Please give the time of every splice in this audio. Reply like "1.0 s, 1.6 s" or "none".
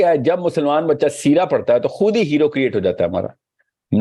none

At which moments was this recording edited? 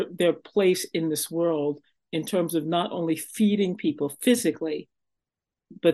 1.9 s

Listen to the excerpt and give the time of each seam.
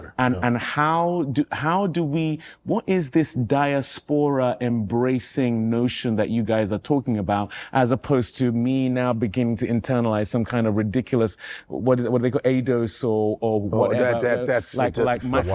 none

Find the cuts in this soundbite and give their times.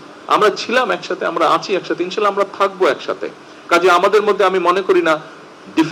none

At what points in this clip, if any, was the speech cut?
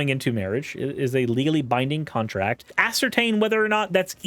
2.7 s

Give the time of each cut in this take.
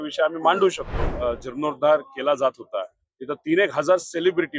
1.1 s

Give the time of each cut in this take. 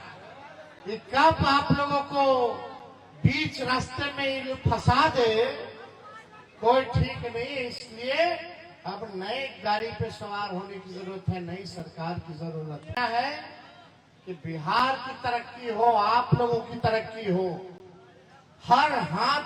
13.0 s

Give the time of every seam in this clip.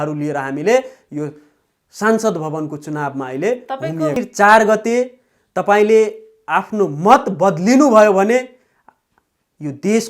4.2 s

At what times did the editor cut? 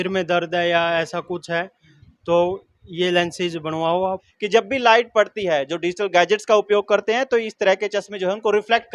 4.3 s

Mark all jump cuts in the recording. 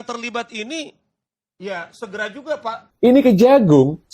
2.8 s

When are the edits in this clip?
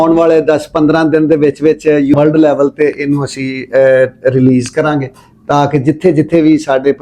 2.1 s

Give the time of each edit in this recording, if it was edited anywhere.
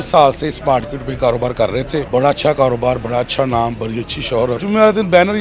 2.1 s, 4.6 s

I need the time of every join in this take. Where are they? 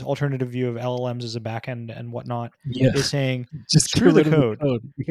none

